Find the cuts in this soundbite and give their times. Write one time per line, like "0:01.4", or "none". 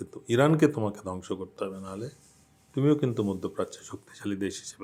none